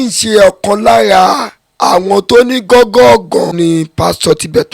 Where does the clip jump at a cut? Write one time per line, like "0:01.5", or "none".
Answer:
0:03.5